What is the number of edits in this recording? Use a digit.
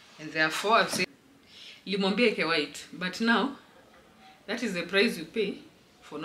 1